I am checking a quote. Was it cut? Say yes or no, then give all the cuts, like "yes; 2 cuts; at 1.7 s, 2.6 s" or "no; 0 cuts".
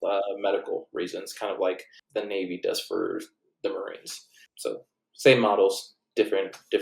yes; 2 cuts; at 1.9 s, 4.7 s